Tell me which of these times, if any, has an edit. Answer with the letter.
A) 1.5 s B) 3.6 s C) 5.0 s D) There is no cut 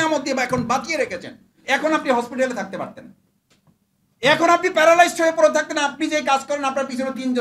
D